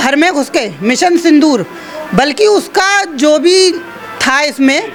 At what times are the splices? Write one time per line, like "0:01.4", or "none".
none